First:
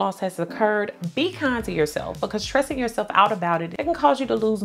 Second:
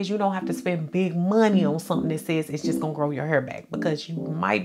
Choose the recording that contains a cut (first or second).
first